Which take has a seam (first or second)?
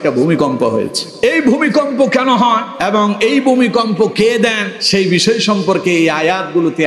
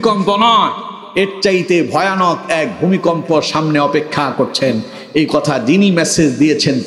first